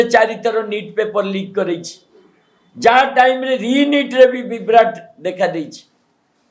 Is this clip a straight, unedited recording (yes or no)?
yes